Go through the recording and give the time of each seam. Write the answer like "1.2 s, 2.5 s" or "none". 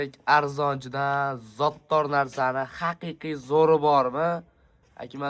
none